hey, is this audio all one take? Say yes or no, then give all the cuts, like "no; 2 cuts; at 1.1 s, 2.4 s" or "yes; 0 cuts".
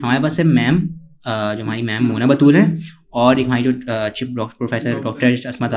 yes; 0 cuts